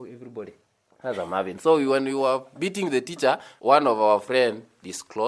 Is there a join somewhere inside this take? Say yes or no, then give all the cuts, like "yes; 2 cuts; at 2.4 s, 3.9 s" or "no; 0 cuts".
yes; 1 cut; at 3.5 s